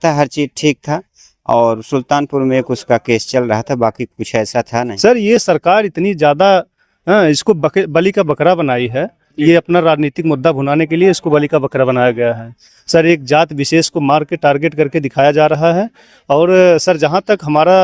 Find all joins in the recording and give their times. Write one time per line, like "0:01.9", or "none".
0:04.9